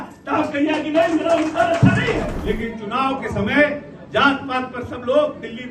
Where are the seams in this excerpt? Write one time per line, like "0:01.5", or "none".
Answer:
0:02.3